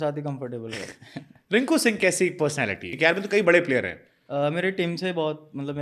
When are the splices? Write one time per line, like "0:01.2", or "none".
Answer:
0:02.9